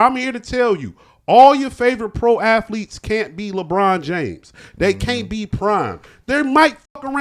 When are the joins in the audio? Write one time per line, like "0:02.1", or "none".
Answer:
none